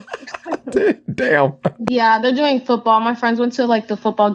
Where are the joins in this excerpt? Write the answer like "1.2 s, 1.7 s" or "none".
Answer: 1.9 s

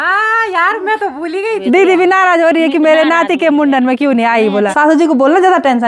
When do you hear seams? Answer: 1.6 s, 4.7 s

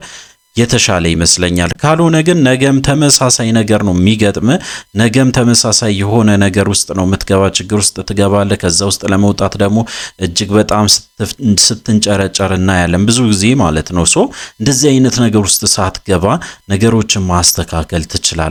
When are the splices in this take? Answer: none

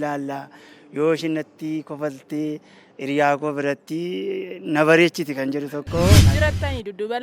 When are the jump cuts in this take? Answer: 6.3 s

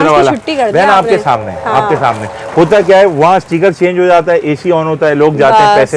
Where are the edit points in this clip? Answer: none

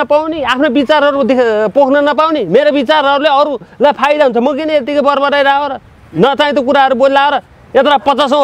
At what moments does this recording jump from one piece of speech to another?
none

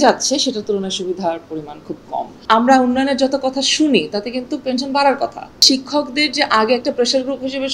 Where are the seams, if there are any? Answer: 2.3 s, 5.6 s

